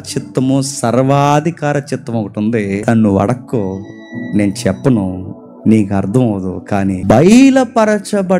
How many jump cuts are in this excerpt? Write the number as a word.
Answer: two